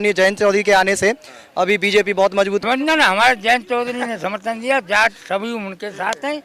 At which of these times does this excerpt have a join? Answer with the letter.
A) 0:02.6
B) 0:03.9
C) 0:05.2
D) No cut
A